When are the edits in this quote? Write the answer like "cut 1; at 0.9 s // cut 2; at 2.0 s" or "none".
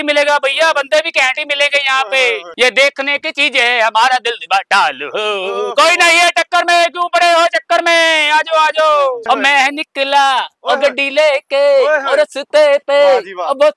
cut 1; at 2.5 s // cut 2; at 9.2 s